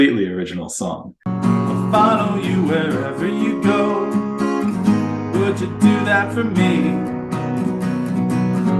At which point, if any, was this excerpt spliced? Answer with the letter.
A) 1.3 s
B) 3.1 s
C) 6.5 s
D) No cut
A